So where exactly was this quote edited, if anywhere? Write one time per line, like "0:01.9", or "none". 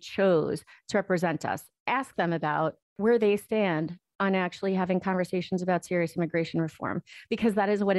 0:01.7